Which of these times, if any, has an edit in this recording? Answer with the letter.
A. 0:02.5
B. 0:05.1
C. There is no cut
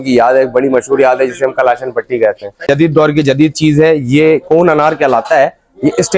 A